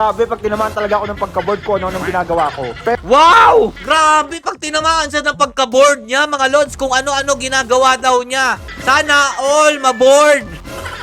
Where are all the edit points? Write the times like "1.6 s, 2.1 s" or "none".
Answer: none